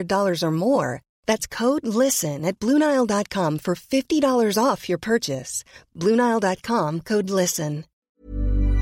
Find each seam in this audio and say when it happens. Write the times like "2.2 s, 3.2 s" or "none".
7.9 s